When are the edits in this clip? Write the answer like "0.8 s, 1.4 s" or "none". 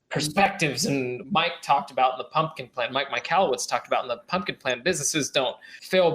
1.2 s